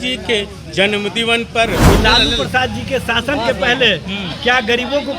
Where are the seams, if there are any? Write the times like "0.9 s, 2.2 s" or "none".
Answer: 1.9 s